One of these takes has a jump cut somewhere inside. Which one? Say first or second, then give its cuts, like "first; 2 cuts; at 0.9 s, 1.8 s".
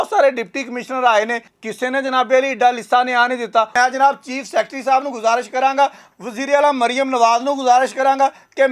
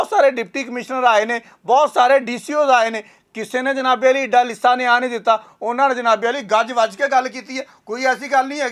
first; 2 cuts; at 1.5 s, 3.7 s